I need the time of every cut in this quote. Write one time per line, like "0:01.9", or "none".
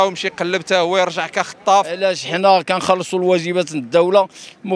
0:02.1